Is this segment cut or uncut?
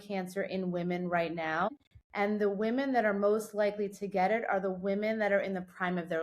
cut